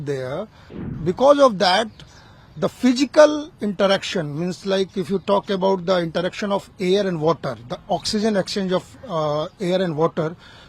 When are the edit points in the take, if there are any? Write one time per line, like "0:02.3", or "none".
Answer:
0:00.9